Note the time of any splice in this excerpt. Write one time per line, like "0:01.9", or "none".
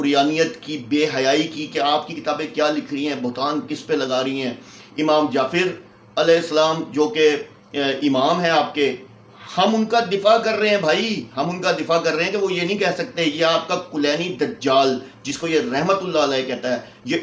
none

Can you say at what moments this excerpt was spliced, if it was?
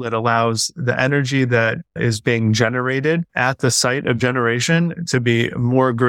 0:01.9
0:03.3

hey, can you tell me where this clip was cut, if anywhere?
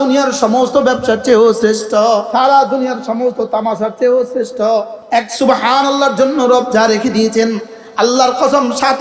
0:02.3
0:05.0

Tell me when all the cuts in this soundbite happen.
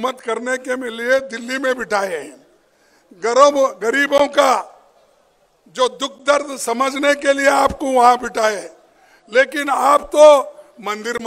none

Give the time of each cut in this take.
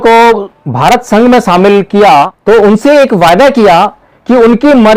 0:02.3

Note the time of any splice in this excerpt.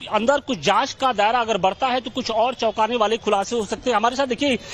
0:03.1

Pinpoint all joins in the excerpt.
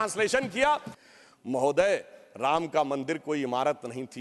0:00.9

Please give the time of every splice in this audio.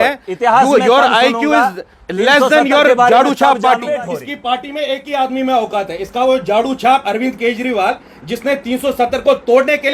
0:04.0

